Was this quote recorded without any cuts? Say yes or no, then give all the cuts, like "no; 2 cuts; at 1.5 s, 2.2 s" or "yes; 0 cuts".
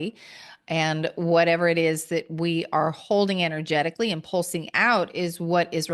yes; 0 cuts